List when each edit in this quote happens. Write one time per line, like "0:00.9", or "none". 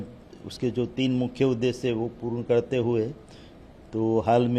none